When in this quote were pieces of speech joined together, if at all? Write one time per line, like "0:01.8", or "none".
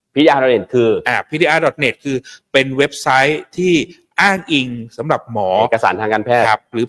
none